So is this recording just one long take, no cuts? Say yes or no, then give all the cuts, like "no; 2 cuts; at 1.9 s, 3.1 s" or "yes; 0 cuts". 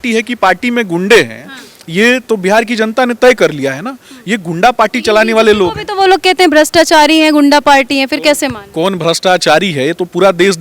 yes; 0 cuts